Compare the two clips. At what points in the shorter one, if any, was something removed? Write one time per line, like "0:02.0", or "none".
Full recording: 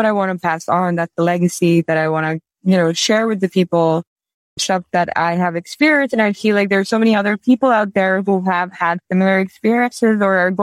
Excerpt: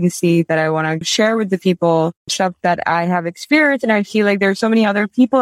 0:01.1
0:02.2